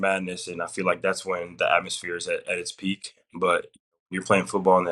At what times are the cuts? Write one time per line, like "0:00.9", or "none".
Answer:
none